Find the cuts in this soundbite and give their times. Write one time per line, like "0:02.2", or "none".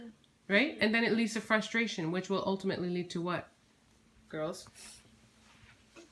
none